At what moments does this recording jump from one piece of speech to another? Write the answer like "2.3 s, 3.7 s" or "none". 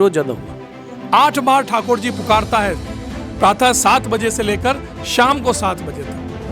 0.9 s

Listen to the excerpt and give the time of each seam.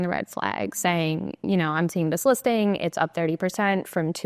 none

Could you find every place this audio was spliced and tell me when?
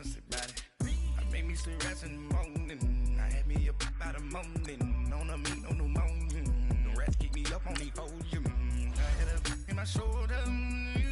5.1 s

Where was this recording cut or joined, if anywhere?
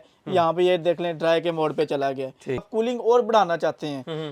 2.6 s

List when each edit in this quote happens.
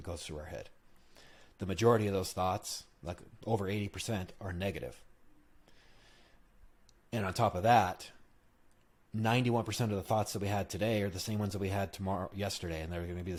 none

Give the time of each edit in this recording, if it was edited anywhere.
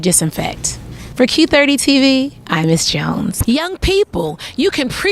3.4 s

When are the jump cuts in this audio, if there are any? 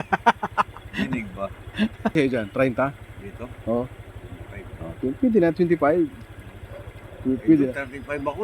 2.1 s

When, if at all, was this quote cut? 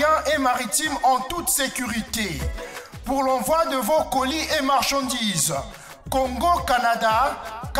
none

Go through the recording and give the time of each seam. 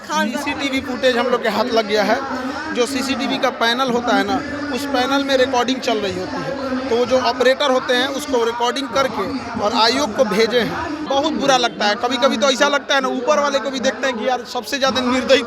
11.0 s

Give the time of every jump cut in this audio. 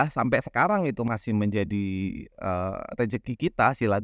1.1 s

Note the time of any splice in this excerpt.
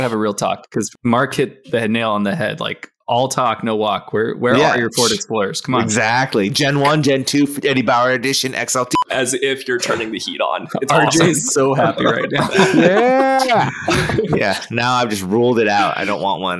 0.9 s, 8.9 s

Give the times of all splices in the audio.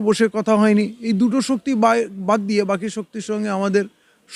none

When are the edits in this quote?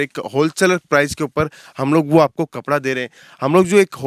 none

